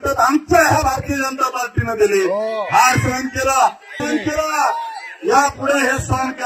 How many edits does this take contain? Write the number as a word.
zero